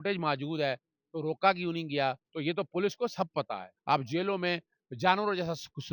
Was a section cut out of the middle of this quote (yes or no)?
yes